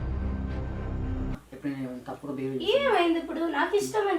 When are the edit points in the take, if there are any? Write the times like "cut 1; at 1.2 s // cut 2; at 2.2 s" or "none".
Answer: cut 1; at 1.3 s